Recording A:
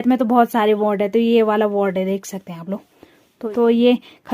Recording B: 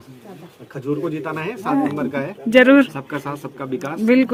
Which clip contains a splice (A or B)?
A